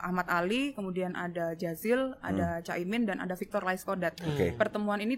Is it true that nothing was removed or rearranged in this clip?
yes; 0 cuts

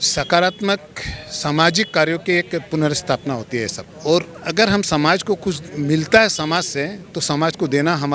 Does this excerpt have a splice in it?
no; 0 cuts

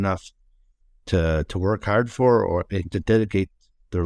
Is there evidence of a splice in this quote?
no; 0 cuts

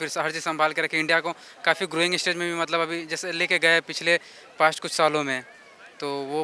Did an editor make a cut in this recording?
no; 0 cuts

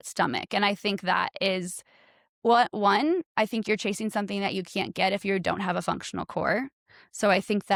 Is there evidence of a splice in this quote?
no; 0 cuts

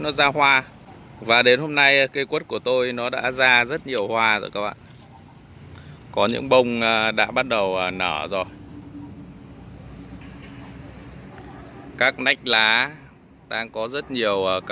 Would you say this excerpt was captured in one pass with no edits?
yes; 0 cuts

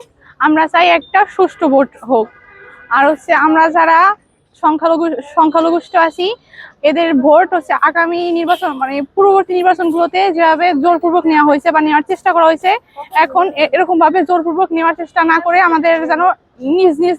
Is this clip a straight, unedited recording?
yes; 0 cuts

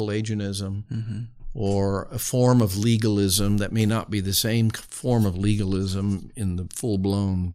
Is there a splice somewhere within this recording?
no; 0 cuts

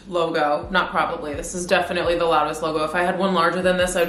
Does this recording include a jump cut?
no; 0 cuts

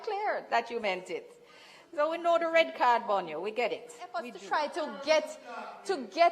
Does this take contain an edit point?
yes; 1 cut; at 4.4 s

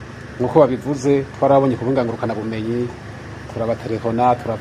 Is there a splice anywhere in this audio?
no; 0 cuts

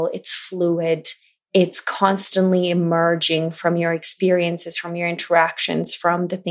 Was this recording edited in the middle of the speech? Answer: no; 0 cuts

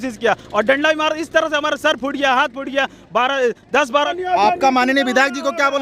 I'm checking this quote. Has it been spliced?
yes; 1 cut; at 4.1 s

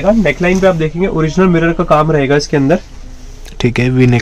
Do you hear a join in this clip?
no; 0 cuts

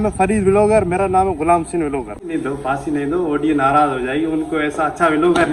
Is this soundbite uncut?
no; 1 cut; at 2.3 s

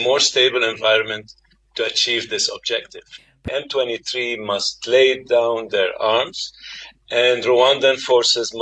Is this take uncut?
no; 1 cut; at 3.5 s

